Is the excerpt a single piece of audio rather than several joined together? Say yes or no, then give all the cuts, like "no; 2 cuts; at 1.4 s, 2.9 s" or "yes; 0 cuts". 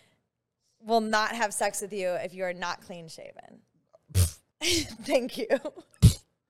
no; 1 cut; at 4.4 s